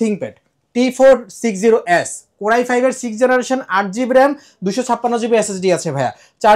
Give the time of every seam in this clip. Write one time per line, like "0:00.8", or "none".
none